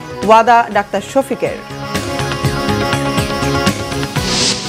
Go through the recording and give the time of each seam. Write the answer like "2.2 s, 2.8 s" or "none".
none